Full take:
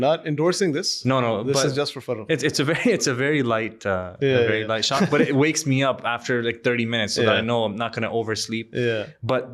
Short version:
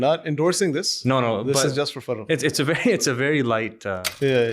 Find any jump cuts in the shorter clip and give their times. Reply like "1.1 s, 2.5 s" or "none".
none